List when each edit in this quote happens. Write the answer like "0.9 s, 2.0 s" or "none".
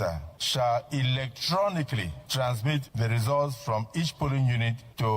2.2 s